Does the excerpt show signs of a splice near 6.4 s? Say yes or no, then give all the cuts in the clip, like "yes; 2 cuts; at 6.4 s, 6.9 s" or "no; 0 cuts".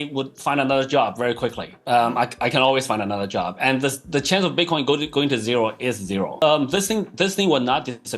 yes; 1 cut; at 6.4 s